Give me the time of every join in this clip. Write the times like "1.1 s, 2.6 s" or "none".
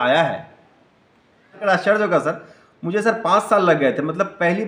1.6 s